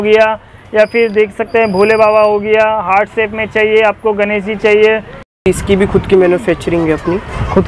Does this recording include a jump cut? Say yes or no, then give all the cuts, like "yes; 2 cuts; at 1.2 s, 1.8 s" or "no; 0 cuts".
yes; 1 cut; at 5.5 s